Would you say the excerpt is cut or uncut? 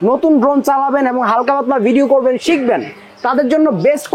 uncut